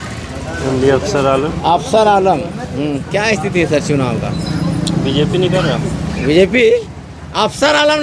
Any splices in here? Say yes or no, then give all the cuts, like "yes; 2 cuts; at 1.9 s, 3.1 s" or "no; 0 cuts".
no; 0 cuts